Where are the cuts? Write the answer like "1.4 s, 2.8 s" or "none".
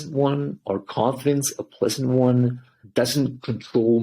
2.8 s